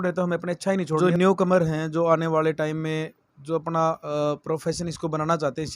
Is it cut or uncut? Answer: cut